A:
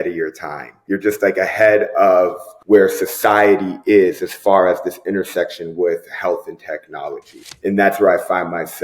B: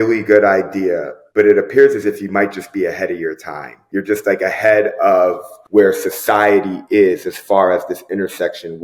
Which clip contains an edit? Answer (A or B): A